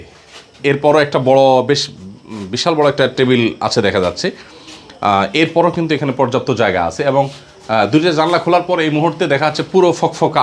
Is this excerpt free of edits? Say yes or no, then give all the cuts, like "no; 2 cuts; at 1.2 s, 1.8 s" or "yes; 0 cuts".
yes; 0 cuts